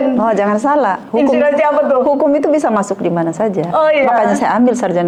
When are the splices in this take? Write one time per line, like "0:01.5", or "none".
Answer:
none

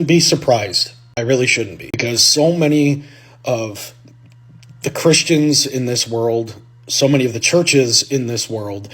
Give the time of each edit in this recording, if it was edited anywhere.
0:01.8

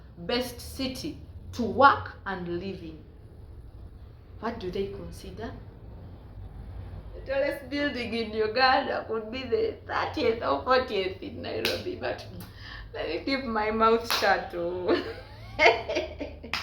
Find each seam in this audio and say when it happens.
0:07.2

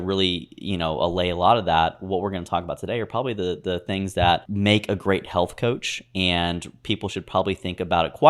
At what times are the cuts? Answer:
0:04.5

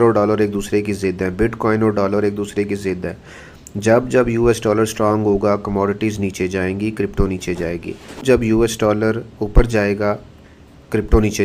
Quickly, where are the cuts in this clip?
none

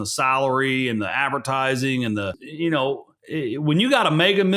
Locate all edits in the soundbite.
0:02.4
0:03.1

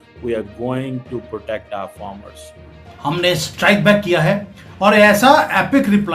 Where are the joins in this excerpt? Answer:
0:02.8

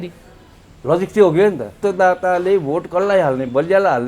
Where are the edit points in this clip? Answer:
0:01.8

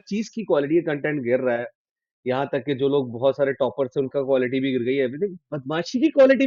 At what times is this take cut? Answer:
none

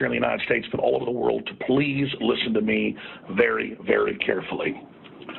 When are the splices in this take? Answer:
none

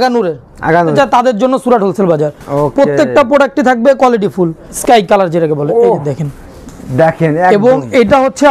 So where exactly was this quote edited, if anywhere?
0:00.9
0:04.7

